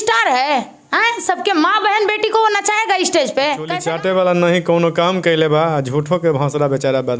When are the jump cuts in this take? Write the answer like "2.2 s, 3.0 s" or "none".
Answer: 3.8 s